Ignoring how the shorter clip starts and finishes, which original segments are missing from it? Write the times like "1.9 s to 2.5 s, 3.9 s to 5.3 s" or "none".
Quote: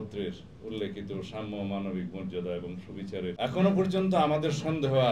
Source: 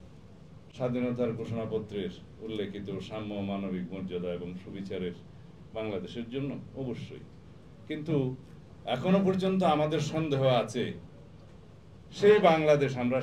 5.1 s to 8.8 s